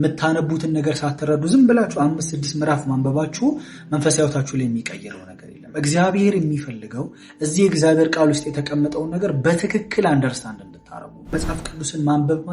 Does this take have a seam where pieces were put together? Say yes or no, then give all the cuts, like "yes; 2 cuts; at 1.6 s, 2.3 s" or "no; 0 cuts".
yes; 1 cut; at 11.3 s